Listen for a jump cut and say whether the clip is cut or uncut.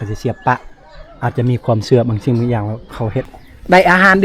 cut